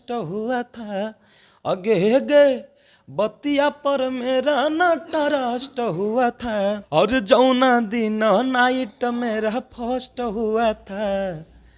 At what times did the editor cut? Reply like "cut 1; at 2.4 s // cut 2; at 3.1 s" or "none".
cut 1; at 6.8 s